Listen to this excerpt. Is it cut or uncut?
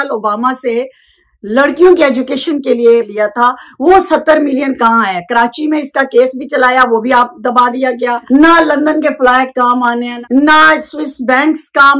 cut